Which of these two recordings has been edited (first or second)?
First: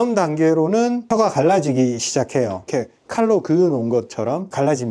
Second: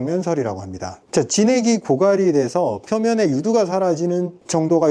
first